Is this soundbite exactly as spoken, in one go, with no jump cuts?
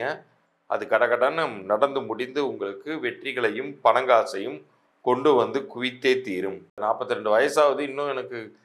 no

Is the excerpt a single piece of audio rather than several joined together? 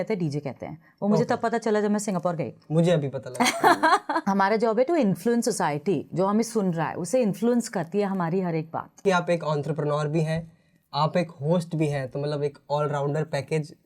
no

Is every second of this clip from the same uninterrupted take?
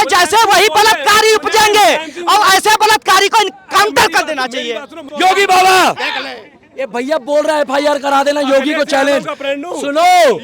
no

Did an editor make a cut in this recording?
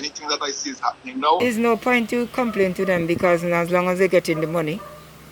yes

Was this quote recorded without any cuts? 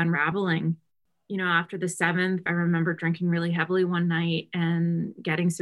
no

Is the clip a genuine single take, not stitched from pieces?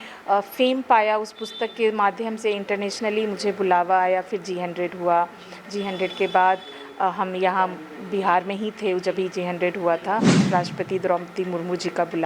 no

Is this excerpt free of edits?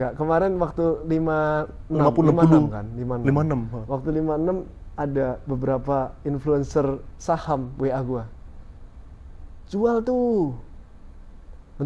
yes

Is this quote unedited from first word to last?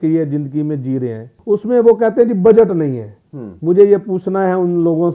no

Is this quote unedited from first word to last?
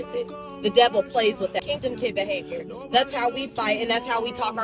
no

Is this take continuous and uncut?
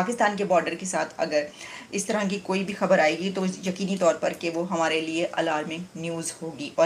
yes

